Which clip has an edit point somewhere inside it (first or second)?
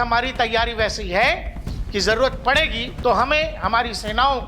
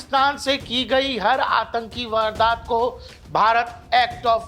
first